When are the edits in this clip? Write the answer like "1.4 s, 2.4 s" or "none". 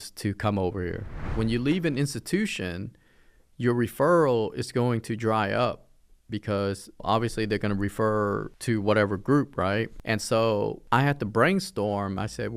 1.3 s, 7.0 s, 8.5 s, 10.0 s, 10.8 s